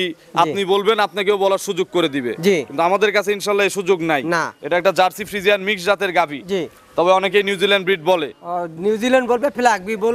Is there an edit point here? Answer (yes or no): no